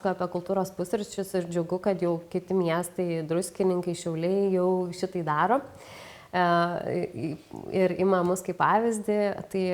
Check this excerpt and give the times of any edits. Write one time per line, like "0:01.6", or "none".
none